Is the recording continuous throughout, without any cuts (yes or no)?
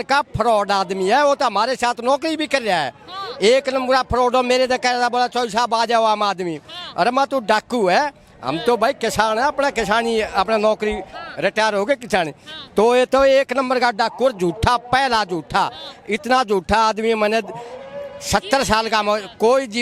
yes